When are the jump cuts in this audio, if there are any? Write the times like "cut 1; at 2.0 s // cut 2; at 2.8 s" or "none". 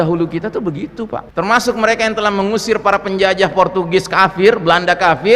cut 1; at 1.2 s